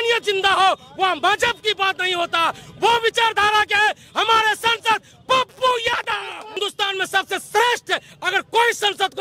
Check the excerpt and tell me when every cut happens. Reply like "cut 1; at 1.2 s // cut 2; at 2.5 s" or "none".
cut 1; at 6.6 s